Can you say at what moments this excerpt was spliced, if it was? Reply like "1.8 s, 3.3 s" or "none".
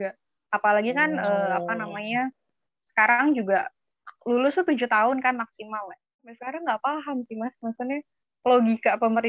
6.4 s